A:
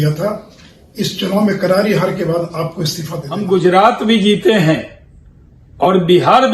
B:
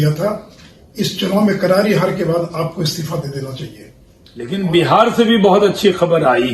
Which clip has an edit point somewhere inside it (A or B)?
A